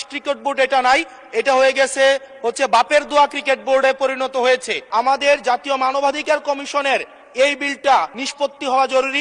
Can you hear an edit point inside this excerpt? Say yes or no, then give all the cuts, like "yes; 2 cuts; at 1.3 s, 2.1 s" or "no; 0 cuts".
yes; 2 cuts; at 4.8 s, 8.2 s